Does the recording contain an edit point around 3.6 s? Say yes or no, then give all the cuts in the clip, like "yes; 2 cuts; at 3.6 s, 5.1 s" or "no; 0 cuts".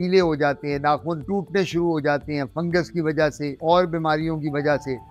no; 0 cuts